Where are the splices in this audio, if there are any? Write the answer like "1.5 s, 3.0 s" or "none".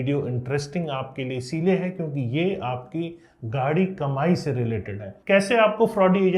5.1 s